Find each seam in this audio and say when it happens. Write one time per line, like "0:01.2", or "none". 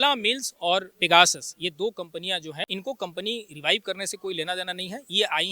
0:00.9
0:02.7

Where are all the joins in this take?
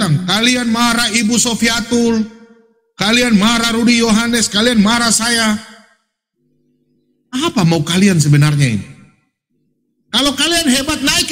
none

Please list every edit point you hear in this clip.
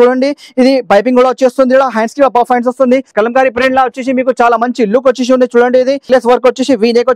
0:03.1
0:06.0

